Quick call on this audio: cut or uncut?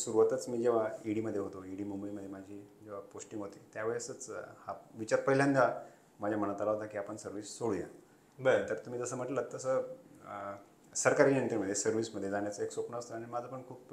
uncut